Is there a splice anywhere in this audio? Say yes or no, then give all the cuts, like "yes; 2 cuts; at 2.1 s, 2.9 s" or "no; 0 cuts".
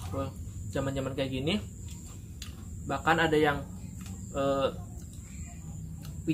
no; 0 cuts